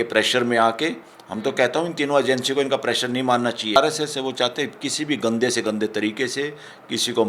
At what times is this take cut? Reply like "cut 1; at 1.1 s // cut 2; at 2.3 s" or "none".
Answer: cut 1; at 3.8 s